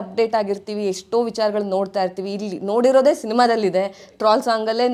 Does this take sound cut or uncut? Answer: uncut